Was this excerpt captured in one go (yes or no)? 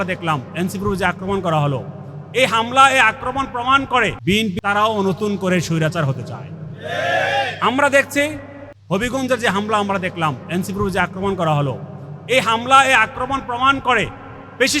no